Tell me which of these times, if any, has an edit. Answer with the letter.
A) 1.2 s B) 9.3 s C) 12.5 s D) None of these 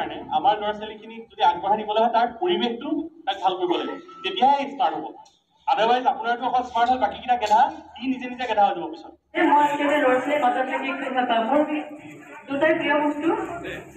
B